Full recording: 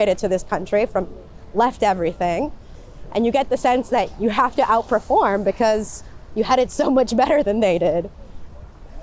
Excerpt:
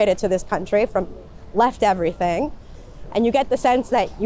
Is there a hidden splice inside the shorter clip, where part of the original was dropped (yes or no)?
no